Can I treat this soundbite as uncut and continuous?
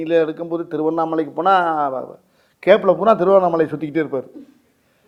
yes; 0 cuts

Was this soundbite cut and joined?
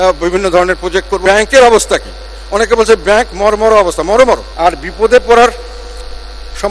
yes; 2 cuts; at 1.1 s, 4.5 s

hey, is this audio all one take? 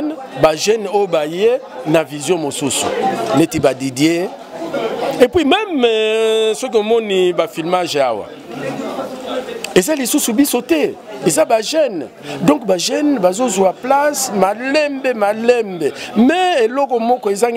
yes; 0 cuts

